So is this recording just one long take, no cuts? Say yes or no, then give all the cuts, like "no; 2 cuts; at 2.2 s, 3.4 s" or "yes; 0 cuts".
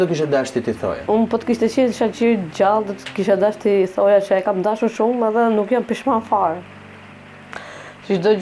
no; 1 cut; at 1.0 s